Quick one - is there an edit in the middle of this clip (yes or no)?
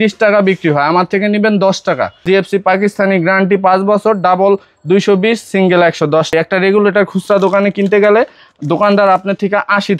yes